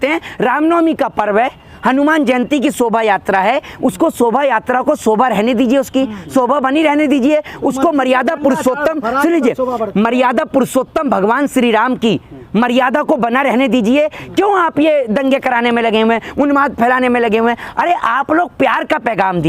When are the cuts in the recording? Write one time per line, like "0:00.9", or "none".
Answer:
none